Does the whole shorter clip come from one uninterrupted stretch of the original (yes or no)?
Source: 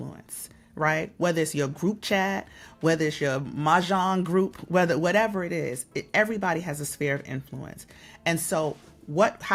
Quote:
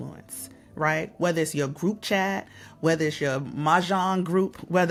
yes